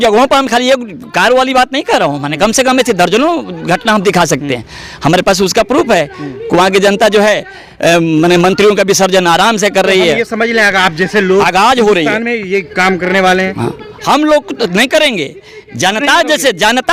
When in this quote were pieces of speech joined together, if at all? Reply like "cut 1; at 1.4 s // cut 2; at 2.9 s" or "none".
none